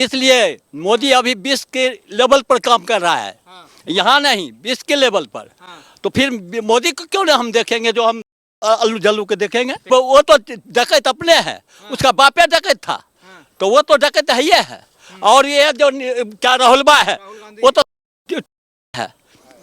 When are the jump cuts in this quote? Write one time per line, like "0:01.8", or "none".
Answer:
0:09.8

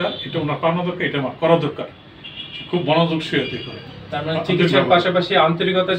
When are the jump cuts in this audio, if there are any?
none

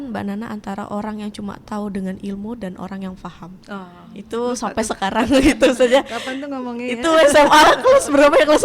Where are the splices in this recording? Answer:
none

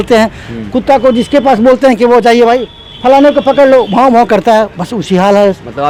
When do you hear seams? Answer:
none

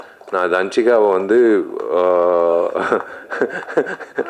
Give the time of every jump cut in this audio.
none

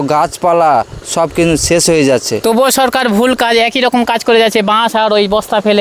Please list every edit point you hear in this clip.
0:02.3

